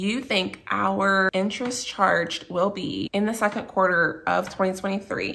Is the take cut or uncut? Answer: cut